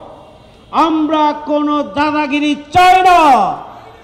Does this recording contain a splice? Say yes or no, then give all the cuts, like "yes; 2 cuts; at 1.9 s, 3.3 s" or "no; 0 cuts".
no; 0 cuts